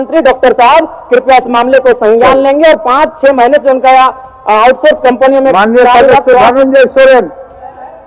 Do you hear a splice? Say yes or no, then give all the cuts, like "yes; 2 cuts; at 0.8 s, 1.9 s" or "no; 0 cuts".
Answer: no; 0 cuts